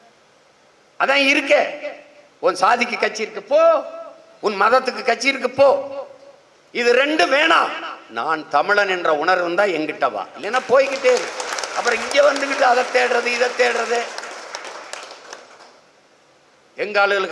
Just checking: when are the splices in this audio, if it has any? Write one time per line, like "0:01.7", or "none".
none